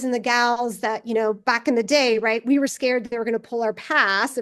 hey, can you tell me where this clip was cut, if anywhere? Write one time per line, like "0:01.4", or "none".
none